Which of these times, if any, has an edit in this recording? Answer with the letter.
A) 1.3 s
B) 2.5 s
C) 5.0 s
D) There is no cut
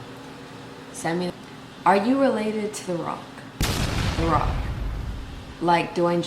A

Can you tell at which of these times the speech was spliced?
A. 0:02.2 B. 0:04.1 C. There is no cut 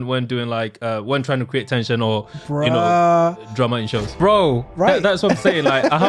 B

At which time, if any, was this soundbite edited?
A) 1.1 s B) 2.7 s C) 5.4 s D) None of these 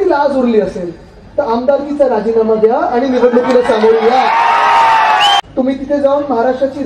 C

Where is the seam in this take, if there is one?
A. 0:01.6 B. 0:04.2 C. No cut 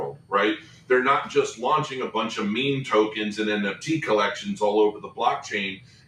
C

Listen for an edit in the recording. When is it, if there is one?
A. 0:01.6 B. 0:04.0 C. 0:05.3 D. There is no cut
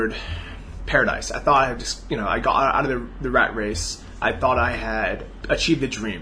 C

